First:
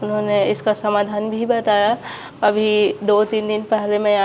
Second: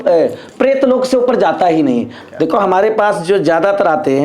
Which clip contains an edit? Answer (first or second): second